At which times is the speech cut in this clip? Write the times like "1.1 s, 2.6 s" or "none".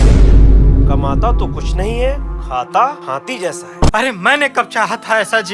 3.9 s